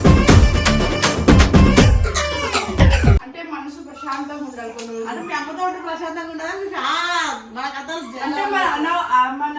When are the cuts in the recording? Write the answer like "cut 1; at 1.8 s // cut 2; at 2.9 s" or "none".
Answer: cut 1; at 3.3 s